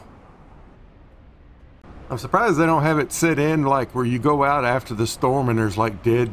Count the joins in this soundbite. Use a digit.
1